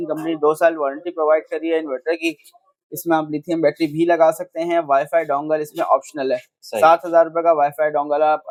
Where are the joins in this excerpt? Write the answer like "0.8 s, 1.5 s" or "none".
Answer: none